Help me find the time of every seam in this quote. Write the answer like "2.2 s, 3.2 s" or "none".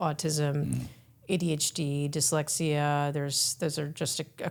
none